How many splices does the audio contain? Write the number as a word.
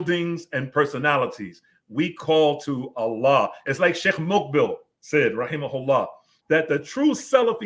one